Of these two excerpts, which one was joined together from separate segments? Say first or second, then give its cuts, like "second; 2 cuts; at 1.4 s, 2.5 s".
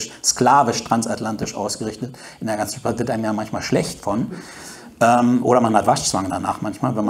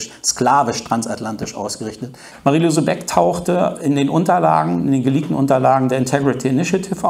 second; 1 cut; at 2.2 s